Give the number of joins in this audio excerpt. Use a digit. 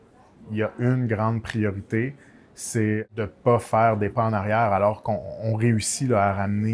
1